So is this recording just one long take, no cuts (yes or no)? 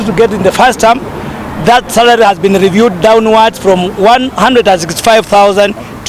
yes